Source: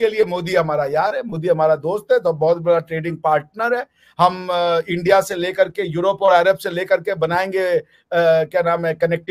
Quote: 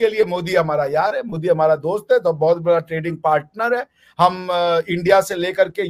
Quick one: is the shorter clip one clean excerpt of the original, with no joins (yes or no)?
yes